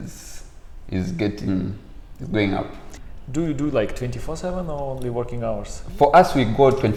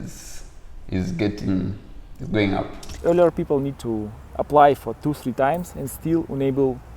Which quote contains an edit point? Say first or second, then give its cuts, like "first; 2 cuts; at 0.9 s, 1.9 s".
second; 1 cut; at 2.9 s